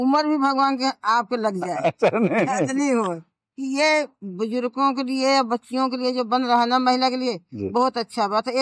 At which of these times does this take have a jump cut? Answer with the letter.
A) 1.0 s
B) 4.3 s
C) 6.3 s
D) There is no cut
D